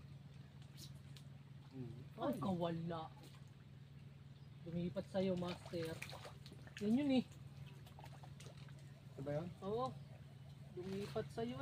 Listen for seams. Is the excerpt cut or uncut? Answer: uncut